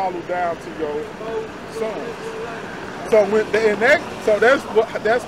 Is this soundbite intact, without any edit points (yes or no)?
yes